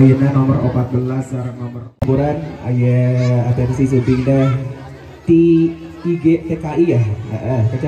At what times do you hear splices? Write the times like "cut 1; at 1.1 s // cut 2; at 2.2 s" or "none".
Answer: cut 1; at 2.0 s